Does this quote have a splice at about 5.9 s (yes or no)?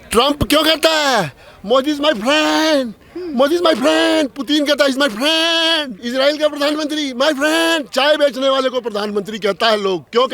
yes